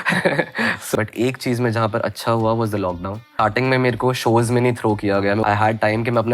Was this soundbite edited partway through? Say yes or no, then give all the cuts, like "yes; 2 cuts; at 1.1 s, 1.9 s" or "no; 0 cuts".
yes; 3 cuts; at 0.9 s, 3.3 s, 5.4 s